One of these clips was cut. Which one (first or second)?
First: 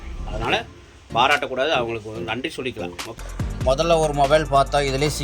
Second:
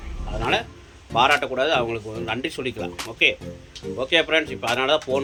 first